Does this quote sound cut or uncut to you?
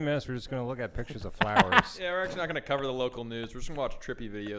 uncut